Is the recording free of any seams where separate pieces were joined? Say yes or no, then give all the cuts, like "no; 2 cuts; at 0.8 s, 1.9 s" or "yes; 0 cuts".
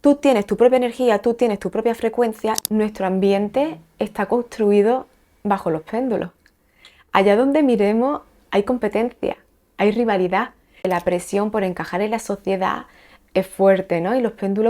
no; 2 cuts; at 2.6 s, 10.8 s